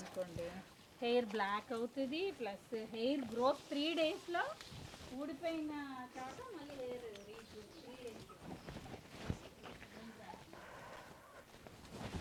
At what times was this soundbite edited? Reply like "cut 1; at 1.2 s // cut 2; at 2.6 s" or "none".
none